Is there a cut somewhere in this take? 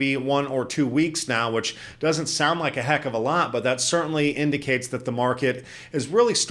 no; 0 cuts

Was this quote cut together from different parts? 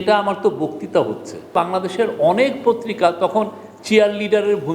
yes; 1 cut; at 1.5 s

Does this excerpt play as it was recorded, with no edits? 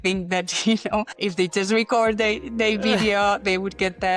no; 1 cut; at 1.1 s

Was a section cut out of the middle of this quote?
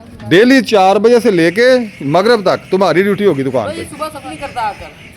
yes; 1 cut; at 4.2 s

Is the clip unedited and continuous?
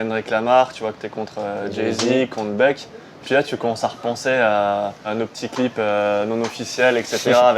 no; 2 cuts; at 3.2 s, 5.1 s

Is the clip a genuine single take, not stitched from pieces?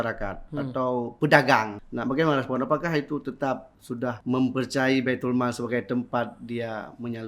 no; 2 cuts; at 1.8 s, 3.8 s

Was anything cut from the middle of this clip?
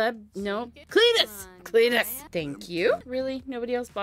yes; 2 cuts; at 2.3 s, 3.0 s

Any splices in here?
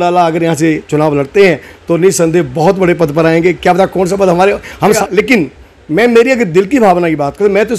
yes; 1 cut; at 5.0 s

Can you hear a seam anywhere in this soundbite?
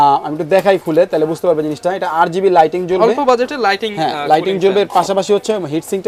no; 0 cuts

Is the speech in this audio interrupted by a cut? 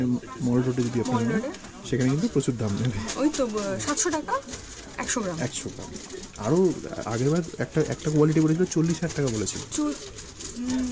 no; 0 cuts

